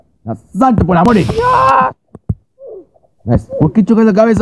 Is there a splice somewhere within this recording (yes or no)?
yes